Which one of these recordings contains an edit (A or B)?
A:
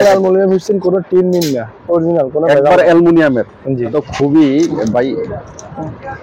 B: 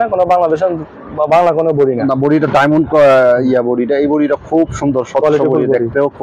A